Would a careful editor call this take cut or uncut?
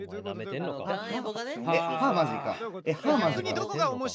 uncut